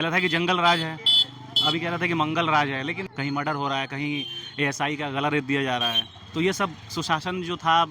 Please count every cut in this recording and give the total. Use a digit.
1